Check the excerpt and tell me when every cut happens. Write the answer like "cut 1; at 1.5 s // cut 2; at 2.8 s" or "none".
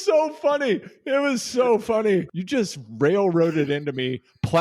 cut 1; at 2.4 s